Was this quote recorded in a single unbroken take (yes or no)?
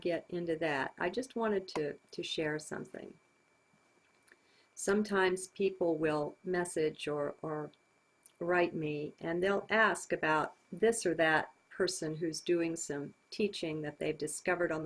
no